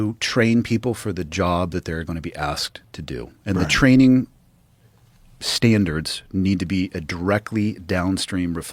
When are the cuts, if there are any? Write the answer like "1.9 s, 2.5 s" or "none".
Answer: none